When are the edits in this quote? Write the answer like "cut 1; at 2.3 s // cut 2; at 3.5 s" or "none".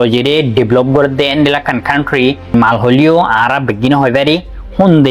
cut 1; at 2.5 s